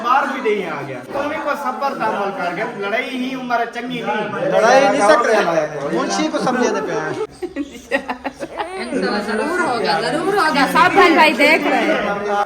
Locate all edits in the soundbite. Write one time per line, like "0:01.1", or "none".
0:01.1
0:07.4